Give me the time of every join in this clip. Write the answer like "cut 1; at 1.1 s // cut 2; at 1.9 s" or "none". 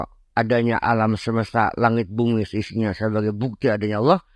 none